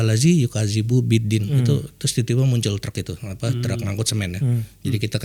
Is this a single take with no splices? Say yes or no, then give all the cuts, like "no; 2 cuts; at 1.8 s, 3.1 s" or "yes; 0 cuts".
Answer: yes; 0 cuts